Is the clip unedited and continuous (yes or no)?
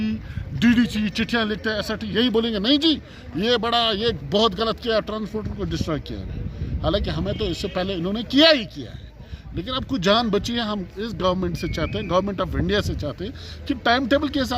yes